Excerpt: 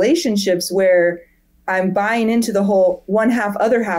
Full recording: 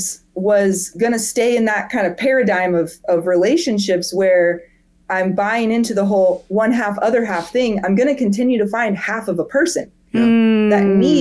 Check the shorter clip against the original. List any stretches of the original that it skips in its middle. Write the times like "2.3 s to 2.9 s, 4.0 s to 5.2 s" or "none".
none